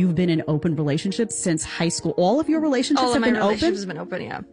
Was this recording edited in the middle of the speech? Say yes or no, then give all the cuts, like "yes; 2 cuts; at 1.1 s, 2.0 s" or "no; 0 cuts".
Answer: no; 0 cuts